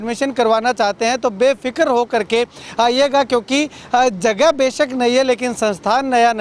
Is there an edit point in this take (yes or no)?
no